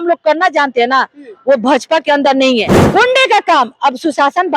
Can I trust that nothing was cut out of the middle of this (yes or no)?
no